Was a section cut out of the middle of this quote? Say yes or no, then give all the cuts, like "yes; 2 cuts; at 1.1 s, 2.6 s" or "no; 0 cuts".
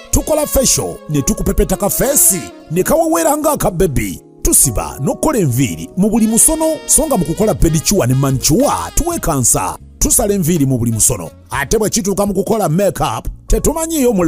no; 0 cuts